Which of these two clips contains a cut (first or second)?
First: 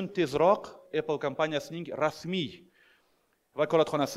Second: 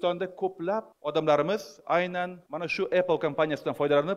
second